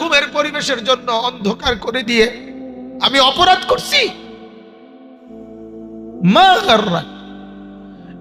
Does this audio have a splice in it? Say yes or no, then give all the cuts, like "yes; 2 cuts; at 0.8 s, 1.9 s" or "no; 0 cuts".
no; 0 cuts